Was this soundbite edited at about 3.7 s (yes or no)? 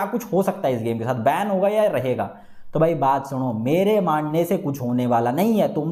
no